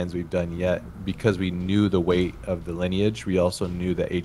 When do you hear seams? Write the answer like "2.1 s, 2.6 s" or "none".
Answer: none